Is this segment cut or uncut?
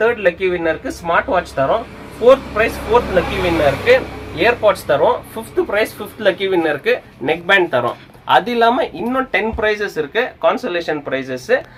uncut